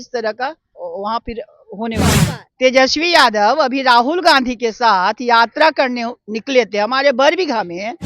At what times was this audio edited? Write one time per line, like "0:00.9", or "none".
0:02.1